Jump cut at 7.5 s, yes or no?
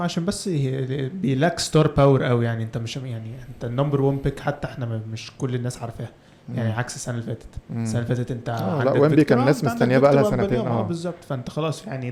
no